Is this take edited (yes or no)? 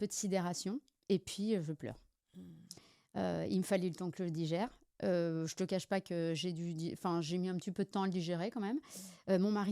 no